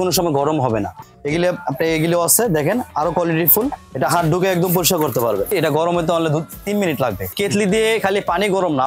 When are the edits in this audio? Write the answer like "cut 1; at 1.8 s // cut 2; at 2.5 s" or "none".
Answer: cut 1; at 1.0 s // cut 2; at 3.8 s // cut 3; at 5.5 s // cut 4; at 7.4 s